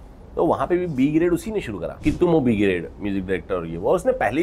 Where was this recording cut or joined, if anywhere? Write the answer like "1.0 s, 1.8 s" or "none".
1.8 s